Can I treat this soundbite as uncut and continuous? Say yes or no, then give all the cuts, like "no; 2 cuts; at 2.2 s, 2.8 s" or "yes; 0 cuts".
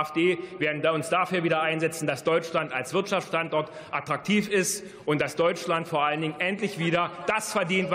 yes; 0 cuts